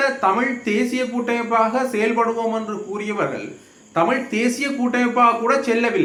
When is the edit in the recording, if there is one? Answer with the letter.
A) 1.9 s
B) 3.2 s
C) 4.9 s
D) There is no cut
D